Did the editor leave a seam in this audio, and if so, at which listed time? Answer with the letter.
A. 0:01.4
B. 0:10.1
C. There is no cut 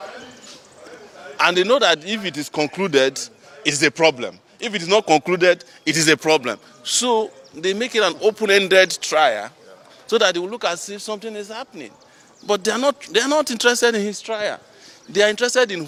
C